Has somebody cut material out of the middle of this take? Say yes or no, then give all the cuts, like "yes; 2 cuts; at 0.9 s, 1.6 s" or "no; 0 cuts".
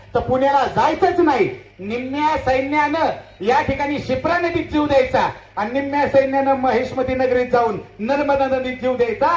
no; 0 cuts